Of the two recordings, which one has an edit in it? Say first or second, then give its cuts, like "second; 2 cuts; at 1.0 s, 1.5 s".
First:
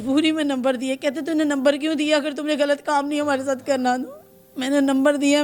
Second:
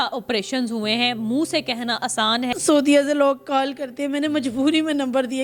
second; 1 cut; at 2.5 s